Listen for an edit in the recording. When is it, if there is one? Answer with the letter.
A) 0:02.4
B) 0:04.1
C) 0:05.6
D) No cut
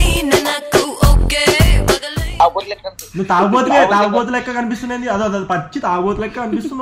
A